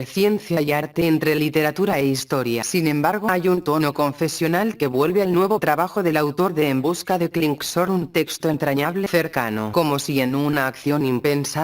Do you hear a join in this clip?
yes; 1 cut; at 7.2 s

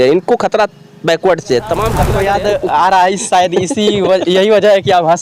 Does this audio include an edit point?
yes; 1 cut; at 2.0 s

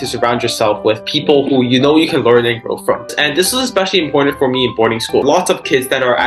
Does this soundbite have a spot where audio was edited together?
yes; 2 cuts; at 3.2 s, 5.2 s

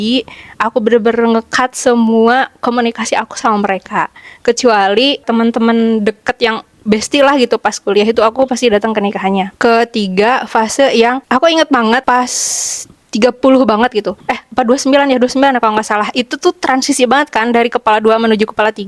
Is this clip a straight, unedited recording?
yes; 0 cuts

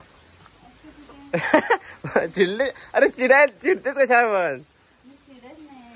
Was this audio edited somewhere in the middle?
no; 0 cuts

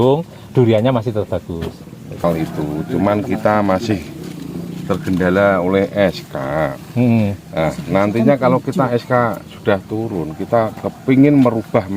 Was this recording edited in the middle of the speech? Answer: yes; 1 cut; at 2.2 s

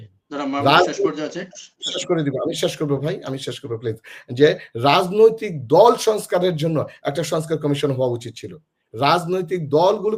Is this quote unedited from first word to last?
yes; 0 cuts

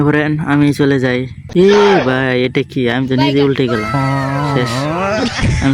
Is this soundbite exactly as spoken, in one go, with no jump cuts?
no; 1 cut; at 1.4 s

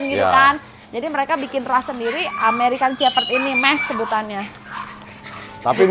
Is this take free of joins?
yes; 0 cuts

